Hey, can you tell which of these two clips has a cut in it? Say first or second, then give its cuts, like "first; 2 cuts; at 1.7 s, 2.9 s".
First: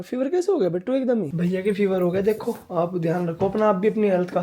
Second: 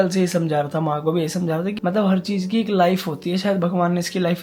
first; 1 cut; at 1.3 s